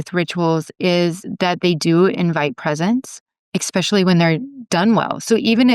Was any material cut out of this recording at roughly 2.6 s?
no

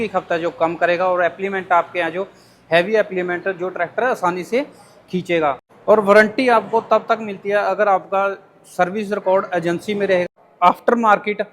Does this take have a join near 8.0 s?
no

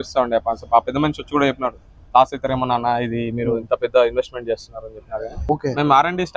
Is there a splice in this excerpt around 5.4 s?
yes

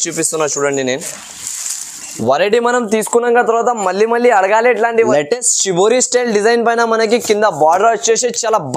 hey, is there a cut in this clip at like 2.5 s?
no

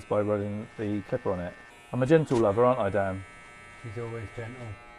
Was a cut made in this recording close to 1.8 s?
yes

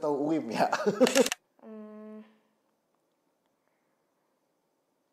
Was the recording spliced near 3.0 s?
no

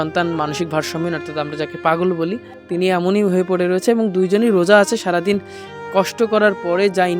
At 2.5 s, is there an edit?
yes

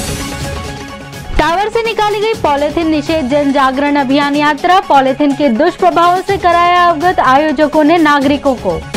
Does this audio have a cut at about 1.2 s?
no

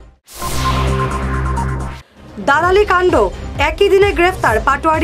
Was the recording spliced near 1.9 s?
yes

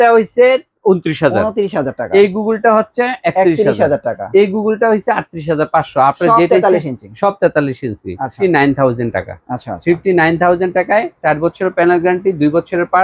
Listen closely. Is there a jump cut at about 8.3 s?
yes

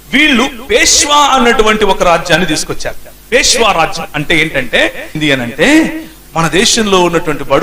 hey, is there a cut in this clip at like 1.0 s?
no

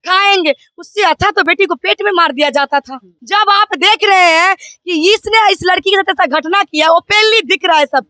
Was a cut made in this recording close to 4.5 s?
no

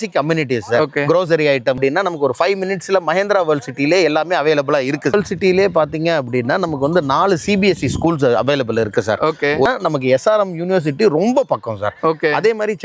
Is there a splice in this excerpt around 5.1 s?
yes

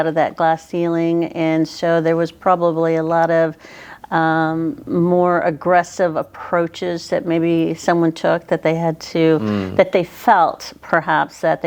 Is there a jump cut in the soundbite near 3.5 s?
no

